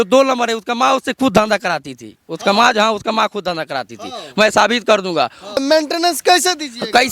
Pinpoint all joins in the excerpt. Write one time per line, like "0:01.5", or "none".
0:05.6